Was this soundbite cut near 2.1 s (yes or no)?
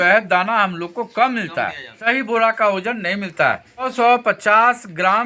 yes